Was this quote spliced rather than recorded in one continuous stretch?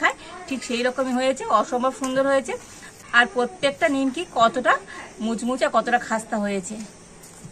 no; 0 cuts

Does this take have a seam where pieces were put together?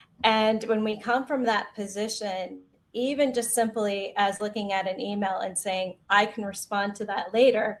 no; 0 cuts

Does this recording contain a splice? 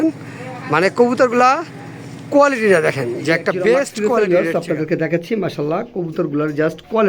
yes; 1 cut; at 4.0 s

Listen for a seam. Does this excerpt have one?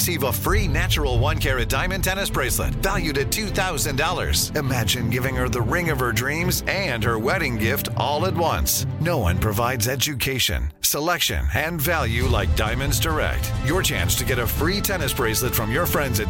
no; 0 cuts

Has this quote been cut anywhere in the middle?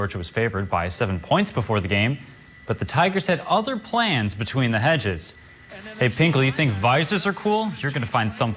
no; 0 cuts

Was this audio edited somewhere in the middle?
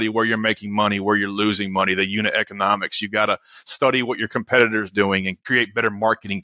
no; 0 cuts

